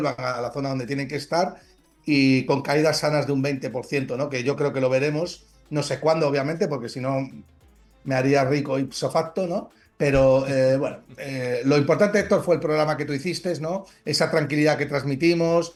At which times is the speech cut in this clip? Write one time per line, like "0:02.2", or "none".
none